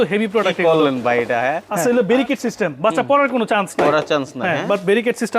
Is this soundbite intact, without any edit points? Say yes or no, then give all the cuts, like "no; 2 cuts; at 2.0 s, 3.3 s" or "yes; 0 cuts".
no; 1 cut; at 1.7 s